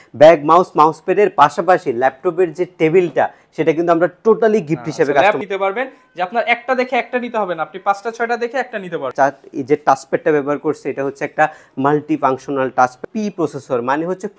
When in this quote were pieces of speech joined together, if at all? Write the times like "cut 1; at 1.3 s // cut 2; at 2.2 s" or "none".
cut 1; at 5.4 s // cut 2; at 9.1 s // cut 3; at 13.0 s